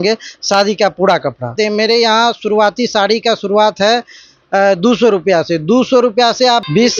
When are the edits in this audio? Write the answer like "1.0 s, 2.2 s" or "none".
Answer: 1.5 s